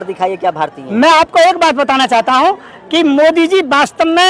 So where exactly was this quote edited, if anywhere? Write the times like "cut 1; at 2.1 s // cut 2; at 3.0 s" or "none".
cut 1; at 2.7 s